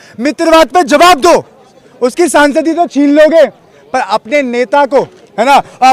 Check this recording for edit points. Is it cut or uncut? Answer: uncut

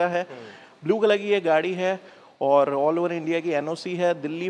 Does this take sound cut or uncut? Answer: uncut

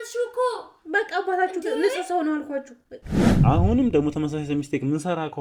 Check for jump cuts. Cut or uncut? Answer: cut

